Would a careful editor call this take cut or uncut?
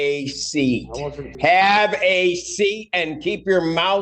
cut